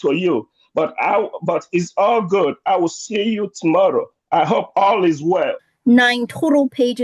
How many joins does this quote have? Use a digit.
1